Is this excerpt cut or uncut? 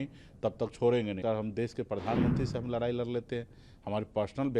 cut